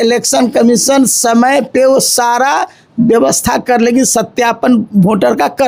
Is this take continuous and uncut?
yes; 0 cuts

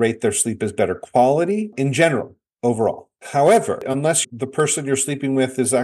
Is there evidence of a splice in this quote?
yes; 1 cut; at 3.9 s

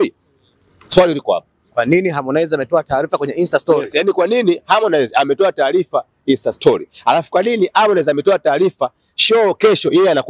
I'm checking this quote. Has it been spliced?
no; 0 cuts

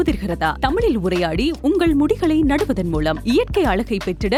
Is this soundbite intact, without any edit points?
yes; 0 cuts

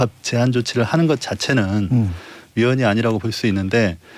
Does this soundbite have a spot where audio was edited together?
no; 0 cuts

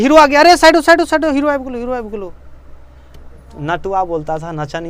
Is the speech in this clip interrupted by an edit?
no; 0 cuts

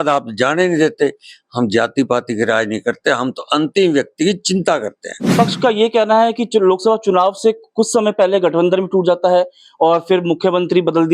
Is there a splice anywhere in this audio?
yes; 1 cut; at 5.3 s

